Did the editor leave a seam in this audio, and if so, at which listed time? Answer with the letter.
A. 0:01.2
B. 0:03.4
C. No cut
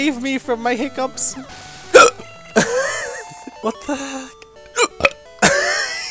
B